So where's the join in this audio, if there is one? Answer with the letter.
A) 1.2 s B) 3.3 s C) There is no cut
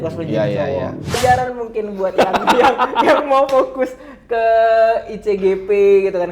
A